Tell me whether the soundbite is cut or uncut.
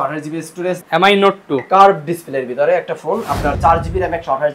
cut